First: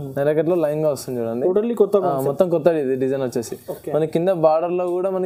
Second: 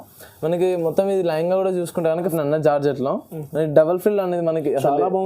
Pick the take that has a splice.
second; 1 cut; at 2.2 s

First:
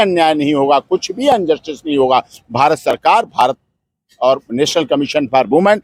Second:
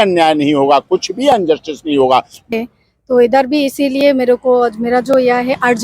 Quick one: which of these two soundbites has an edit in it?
second; 1 cut; at 2.5 s

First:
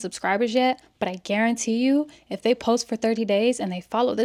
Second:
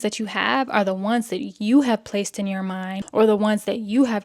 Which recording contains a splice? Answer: second; 1 cut; at 3.0 s

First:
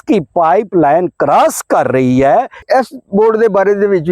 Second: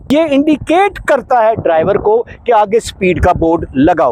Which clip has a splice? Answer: first; 1 cut; at 2.6 s

